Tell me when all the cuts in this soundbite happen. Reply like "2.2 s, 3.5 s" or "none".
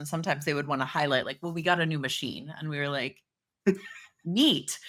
none